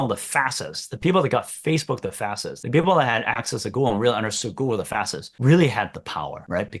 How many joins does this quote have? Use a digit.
0